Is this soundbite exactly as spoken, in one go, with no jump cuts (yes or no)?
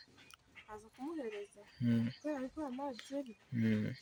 yes